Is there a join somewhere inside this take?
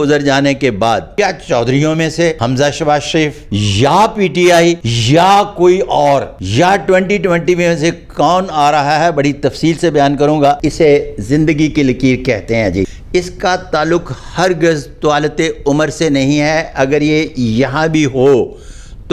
yes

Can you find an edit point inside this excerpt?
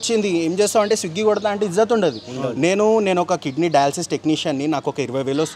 no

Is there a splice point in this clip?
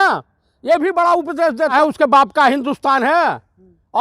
yes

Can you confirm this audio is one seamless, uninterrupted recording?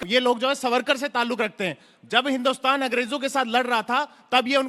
yes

